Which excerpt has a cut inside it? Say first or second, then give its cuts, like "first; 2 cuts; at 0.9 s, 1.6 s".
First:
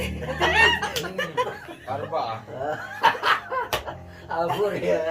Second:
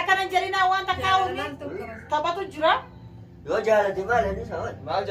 first; 1 cut; at 1.5 s